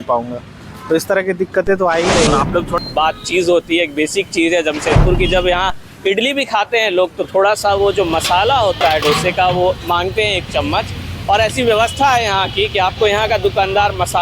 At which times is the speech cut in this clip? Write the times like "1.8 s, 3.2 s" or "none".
2.8 s